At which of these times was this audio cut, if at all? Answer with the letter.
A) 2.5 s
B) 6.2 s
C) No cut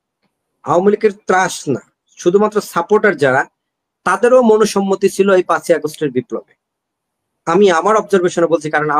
C